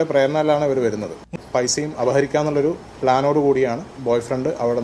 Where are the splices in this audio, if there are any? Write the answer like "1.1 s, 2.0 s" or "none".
1.3 s